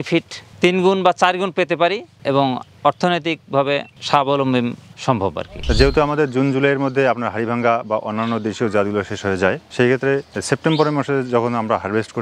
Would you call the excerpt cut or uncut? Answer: cut